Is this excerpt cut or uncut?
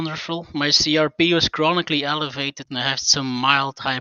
cut